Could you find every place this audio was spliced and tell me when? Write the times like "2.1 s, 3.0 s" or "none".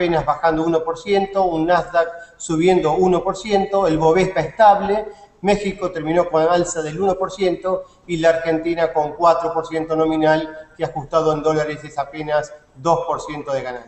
12.2 s